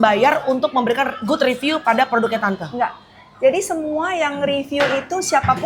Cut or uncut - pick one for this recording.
uncut